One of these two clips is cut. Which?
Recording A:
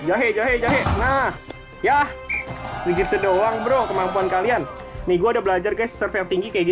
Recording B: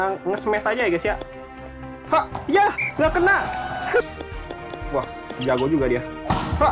B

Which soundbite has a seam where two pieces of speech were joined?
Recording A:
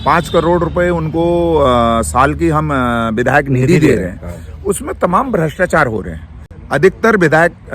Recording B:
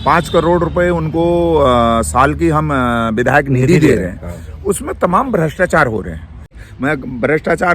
B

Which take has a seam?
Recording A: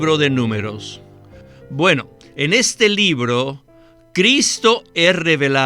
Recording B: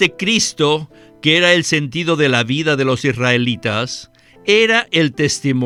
A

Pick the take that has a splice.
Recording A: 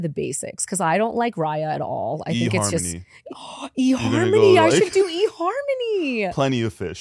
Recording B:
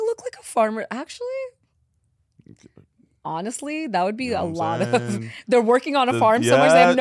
A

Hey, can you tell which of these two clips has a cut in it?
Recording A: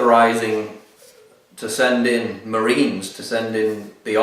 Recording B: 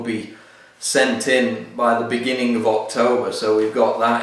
B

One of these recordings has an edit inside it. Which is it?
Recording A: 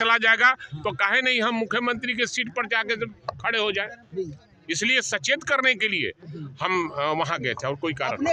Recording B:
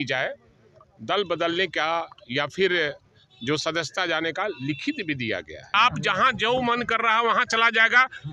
B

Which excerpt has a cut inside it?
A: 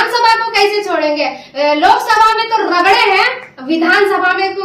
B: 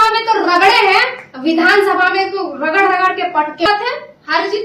B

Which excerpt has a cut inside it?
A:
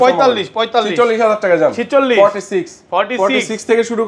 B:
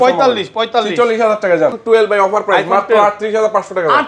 B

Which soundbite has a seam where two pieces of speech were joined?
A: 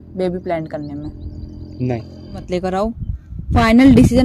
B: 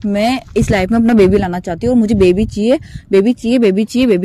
A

